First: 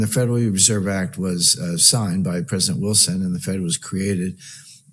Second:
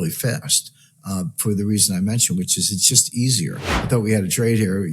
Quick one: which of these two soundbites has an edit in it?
second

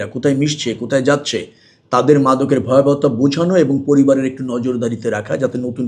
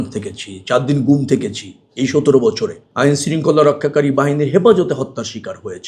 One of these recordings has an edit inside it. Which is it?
second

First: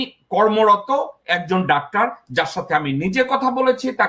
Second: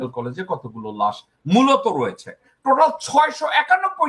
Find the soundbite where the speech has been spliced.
second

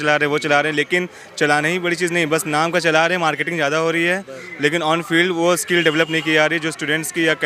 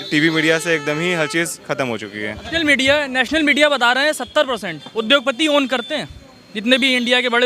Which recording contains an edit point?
second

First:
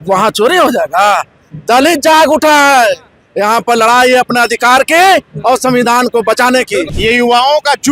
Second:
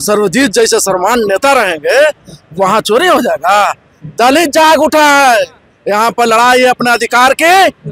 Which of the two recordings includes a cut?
first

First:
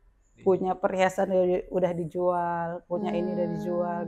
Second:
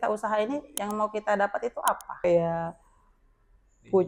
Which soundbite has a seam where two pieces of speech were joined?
second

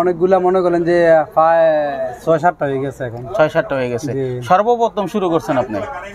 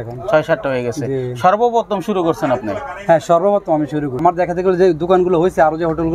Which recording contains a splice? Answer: second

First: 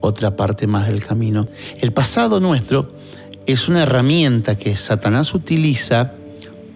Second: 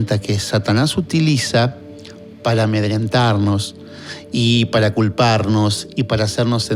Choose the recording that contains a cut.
first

